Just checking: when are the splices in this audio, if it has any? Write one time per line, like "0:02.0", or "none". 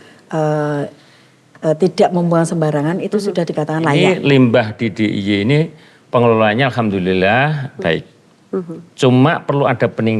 0:04.0